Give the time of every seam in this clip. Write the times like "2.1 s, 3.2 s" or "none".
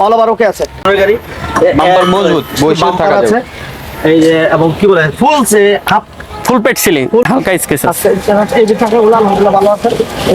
0.8 s, 7.2 s